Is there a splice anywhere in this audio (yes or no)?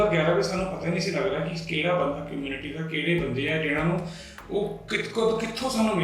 no